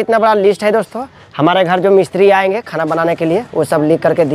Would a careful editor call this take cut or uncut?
uncut